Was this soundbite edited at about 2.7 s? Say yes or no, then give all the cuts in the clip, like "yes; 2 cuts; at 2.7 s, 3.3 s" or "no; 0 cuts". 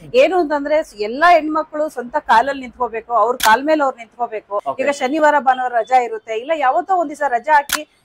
no; 1 cut; at 4.7 s